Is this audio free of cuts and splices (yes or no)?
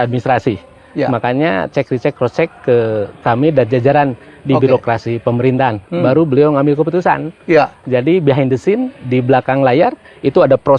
yes